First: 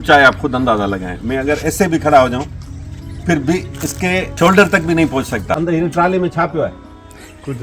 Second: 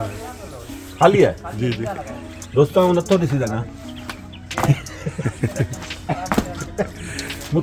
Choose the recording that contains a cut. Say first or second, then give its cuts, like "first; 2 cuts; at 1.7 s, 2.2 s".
first; 2 cuts; at 4.3 s, 5.6 s